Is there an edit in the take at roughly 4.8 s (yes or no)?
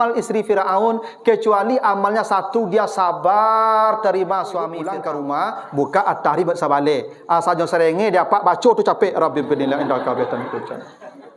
yes